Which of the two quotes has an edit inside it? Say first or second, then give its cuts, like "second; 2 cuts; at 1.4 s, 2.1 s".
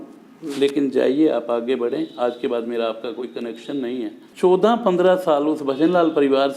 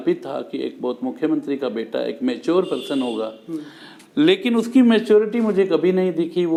first; 1 cut; at 4.2 s